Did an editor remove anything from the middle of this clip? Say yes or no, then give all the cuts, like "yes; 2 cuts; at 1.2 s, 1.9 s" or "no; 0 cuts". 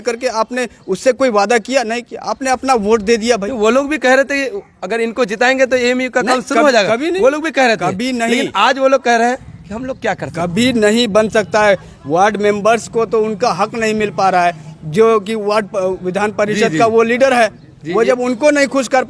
no; 0 cuts